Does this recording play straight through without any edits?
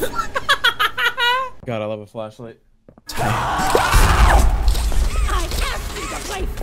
no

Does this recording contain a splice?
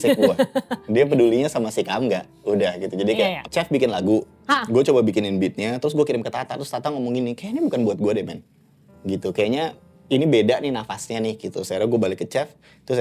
yes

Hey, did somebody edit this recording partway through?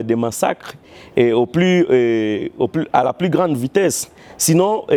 no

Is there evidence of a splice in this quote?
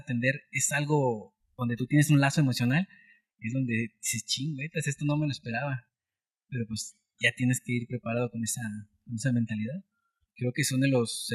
yes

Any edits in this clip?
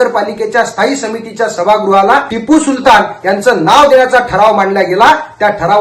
yes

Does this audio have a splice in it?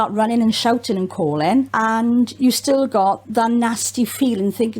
yes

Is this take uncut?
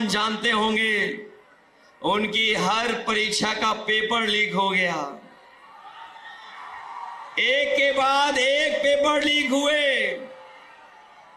yes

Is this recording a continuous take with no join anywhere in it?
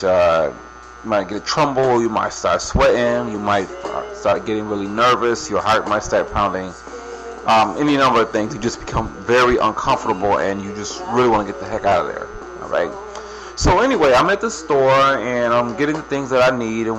yes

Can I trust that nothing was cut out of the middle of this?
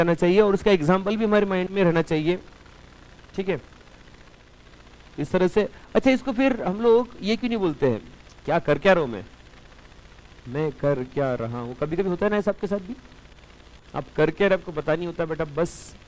no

